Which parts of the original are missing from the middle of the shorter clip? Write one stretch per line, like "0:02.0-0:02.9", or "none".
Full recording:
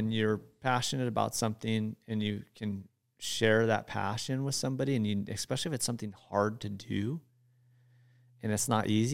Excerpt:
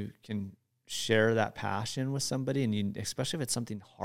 none